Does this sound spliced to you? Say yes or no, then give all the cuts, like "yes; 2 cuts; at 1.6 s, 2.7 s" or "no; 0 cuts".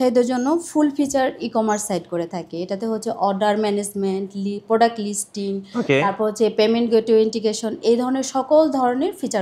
no; 0 cuts